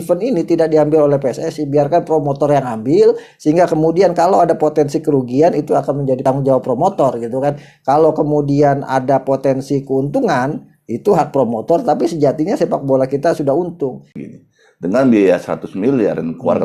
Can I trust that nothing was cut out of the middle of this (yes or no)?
no